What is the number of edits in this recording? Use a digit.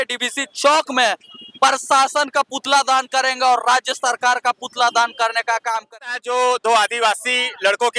1